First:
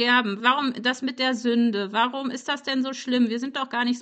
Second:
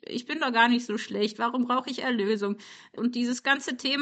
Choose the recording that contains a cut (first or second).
second